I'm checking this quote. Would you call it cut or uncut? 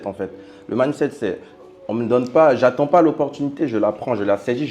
uncut